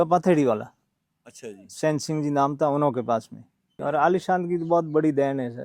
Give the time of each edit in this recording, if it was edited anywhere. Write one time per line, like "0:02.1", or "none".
0:03.7